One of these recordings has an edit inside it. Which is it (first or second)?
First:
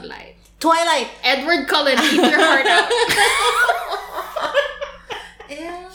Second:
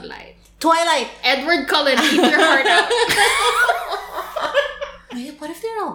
second